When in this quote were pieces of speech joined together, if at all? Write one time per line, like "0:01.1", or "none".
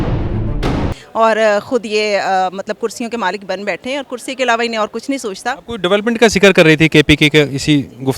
none